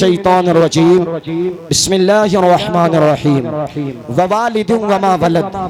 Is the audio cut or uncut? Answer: uncut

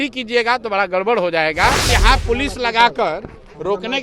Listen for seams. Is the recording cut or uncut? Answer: cut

